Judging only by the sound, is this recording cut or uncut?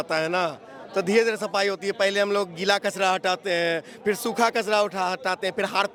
uncut